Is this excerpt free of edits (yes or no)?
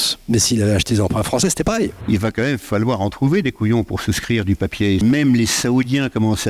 no